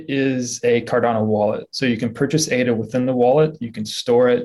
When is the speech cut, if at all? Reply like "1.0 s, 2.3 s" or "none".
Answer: none